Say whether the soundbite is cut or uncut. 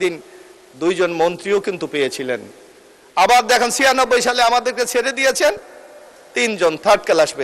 uncut